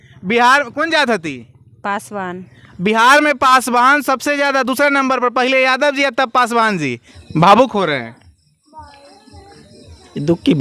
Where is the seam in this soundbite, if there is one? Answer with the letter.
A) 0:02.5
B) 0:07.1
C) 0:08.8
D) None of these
B